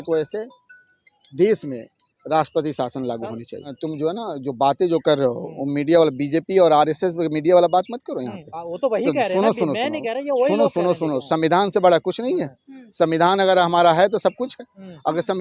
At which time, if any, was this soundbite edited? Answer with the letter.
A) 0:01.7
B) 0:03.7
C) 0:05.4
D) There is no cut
B